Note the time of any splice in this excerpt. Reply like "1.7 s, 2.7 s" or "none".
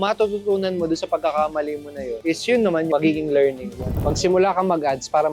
2.9 s, 3.9 s